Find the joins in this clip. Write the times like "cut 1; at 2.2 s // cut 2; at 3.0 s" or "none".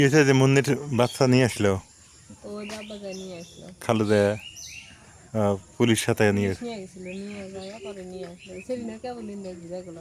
none